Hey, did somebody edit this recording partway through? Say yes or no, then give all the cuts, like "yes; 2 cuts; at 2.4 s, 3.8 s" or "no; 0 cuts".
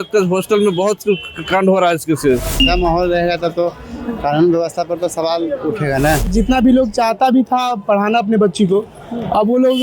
yes; 2 cuts; at 2.6 s, 6.3 s